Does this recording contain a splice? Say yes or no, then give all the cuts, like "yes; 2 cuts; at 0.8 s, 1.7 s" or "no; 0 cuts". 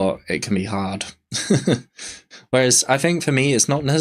no; 0 cuts